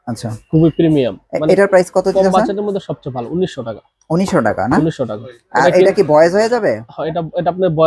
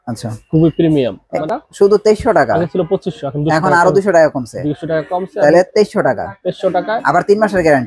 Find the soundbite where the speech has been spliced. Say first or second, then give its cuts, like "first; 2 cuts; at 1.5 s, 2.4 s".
second; 1 cut; at 1.4 s